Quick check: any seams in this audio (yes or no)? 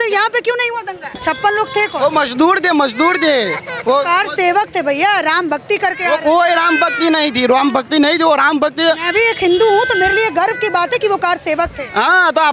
yes